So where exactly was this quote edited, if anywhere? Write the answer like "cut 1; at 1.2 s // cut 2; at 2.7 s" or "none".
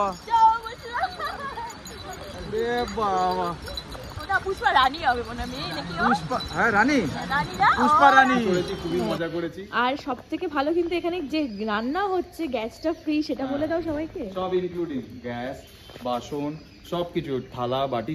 cut 1; at 8.5 s